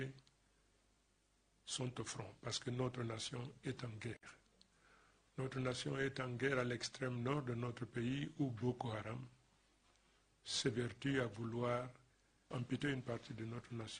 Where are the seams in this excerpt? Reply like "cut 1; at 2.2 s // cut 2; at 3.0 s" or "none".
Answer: cut 1; at 11.8 s